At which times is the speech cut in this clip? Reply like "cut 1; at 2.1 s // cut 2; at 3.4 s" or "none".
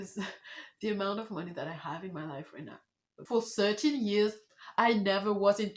cut 1; at 3.2 s